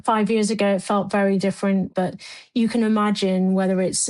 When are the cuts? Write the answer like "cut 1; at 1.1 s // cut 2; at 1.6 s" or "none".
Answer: cut 1; at 1.9 s